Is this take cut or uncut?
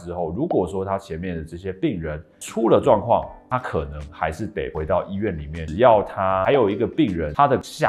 cut